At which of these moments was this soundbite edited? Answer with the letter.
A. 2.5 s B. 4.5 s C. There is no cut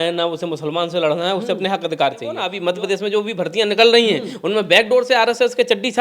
A